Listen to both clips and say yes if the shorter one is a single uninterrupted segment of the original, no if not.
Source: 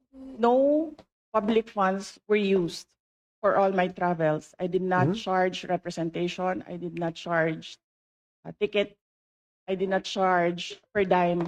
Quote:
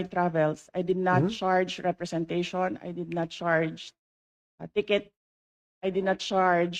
yes